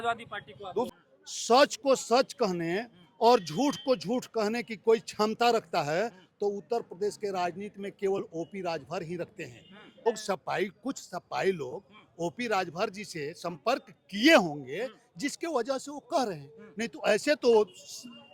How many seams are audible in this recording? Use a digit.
2